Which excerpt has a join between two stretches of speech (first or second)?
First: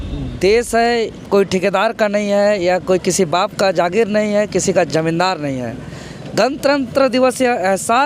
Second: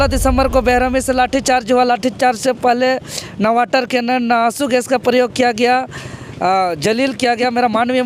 first